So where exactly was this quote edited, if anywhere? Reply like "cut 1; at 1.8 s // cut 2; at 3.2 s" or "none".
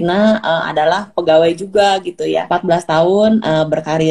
cut 1; at 2.5 s